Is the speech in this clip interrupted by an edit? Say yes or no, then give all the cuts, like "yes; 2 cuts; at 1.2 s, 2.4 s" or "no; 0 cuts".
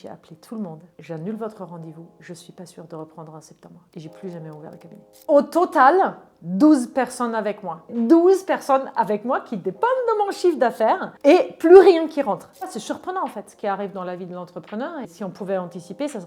yes; 5 cuts; at 0.9 s, 5.1 s, 7.9 s, 12.7 s, 15.1 s